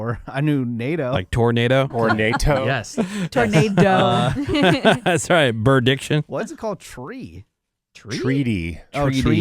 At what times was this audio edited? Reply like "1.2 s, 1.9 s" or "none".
1.2 s, 1.9 s

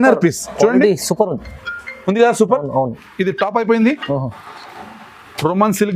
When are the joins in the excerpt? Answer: none

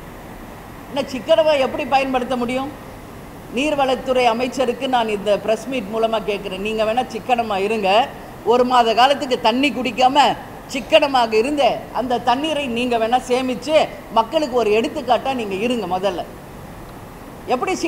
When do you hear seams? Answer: none

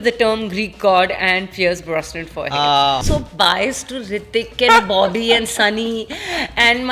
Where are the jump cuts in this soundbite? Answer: 3.0 s

